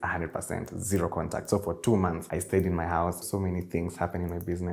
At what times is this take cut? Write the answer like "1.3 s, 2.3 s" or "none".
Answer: 2.3 s, 3.2 s